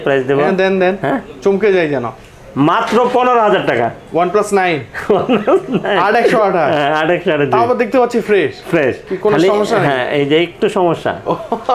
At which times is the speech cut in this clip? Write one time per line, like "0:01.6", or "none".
none